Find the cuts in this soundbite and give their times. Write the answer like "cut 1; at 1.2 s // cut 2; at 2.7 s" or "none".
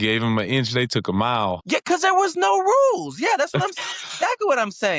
cut 1; at 1.6 s